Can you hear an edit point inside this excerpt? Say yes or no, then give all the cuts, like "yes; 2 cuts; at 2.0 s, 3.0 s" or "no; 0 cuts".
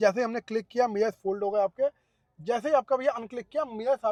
no; 0 cuts